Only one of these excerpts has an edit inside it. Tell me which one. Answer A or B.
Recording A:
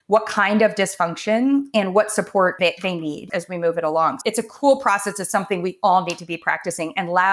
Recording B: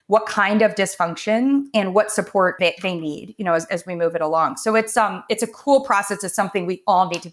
A